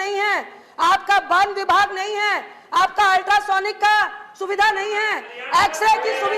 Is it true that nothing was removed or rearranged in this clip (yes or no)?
yes